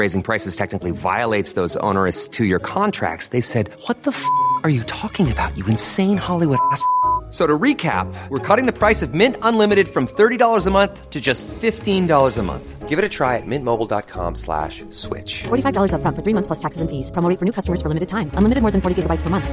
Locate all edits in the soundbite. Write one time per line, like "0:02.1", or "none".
none